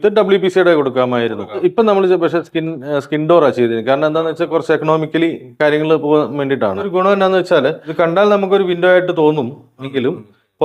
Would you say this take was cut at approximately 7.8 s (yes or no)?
yes